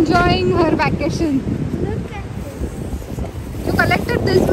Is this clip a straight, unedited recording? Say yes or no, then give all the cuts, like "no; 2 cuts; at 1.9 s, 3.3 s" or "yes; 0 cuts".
yes; 0 cuts